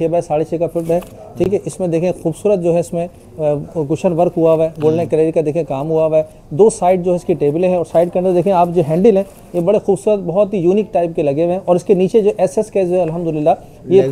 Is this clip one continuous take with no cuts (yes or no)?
yes